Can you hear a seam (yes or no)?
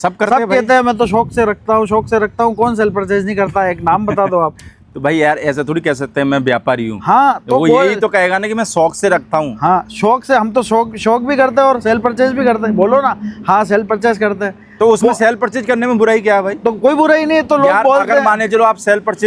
no